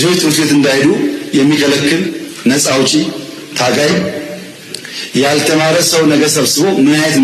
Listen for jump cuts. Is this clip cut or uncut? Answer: uncut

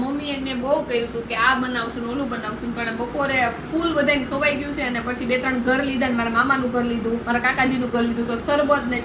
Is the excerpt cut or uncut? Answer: uncut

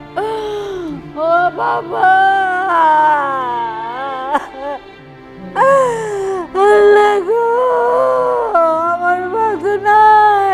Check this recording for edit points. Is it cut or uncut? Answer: uncut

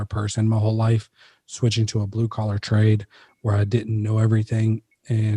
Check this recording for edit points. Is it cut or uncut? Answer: uncut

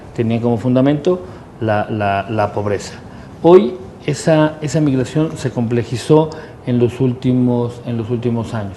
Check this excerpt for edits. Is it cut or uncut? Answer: cut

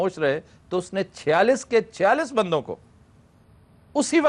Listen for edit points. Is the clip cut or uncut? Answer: uncut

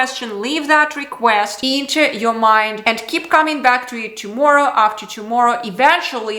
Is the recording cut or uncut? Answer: uncut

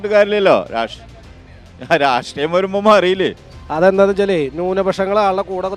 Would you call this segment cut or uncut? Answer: cut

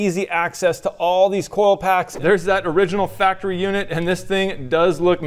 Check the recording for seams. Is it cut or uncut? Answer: cut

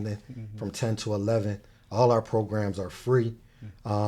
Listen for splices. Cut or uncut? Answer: uncut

